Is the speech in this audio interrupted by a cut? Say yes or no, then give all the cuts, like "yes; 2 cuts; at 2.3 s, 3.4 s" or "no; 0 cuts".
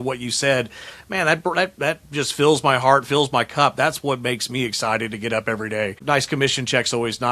yes; 1 cut; at 6.0 s